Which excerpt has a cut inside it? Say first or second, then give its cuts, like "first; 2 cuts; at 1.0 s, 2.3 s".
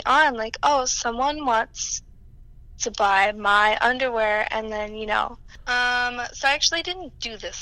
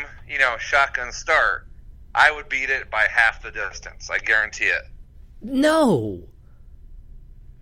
first; 1 cut; at 5.5 s